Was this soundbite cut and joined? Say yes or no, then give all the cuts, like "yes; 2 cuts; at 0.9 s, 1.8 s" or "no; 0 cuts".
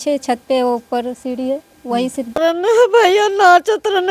yes; 1 cut; at 2.4 s